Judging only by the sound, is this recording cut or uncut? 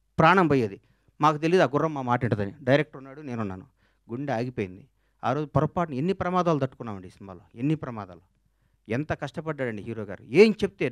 uncut